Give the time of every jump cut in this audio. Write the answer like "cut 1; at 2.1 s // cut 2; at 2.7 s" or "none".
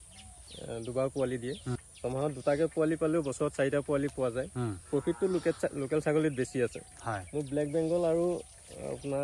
cut 1; at 1.8 s